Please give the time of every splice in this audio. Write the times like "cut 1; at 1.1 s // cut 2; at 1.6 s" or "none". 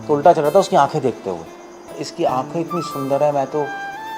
cut 1; at 2.0 s